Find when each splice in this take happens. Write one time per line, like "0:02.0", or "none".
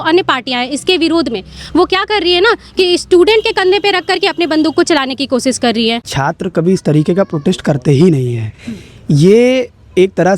0:06.1